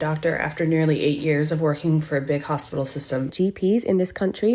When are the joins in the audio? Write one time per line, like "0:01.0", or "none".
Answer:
0:03.3